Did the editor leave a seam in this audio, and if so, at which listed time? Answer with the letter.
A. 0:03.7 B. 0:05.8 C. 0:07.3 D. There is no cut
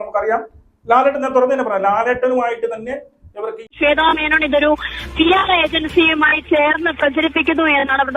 A